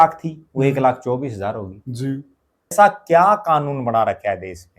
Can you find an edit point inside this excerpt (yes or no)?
yes